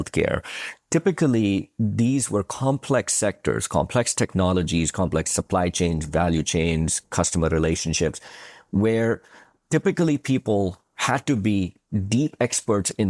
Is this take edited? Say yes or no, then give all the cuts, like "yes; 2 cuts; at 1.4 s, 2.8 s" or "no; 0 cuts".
no; 0 cuts